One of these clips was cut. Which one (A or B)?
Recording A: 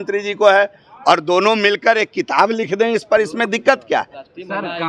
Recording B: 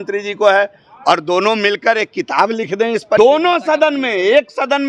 B